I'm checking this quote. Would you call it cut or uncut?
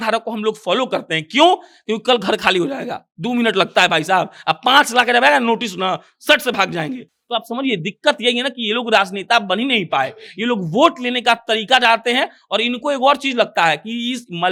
uncut